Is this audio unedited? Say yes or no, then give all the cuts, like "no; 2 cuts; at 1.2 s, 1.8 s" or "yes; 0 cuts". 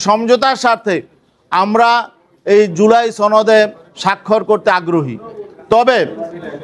yes; 0 cuts